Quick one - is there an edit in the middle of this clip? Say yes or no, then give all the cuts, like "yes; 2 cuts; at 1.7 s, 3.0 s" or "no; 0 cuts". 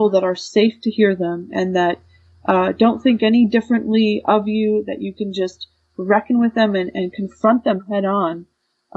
no; 0 cuts